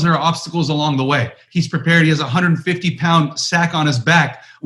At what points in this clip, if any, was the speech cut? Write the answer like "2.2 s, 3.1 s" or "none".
1.4 s